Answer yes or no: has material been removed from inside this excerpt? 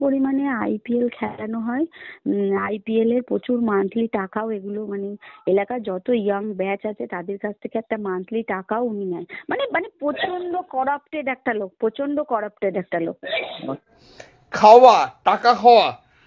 yes